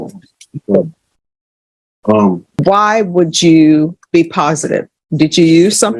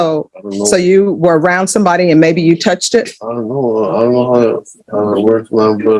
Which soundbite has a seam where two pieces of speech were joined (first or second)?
first